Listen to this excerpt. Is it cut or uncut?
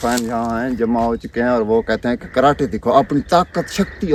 uncut